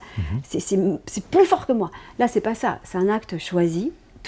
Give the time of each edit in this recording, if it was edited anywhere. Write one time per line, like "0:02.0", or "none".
none